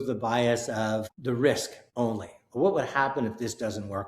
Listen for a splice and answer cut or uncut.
cut